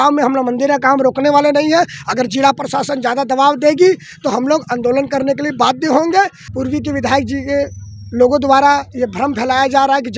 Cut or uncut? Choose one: cut